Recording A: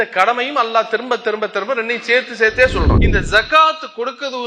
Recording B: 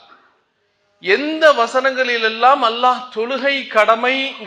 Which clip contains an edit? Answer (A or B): A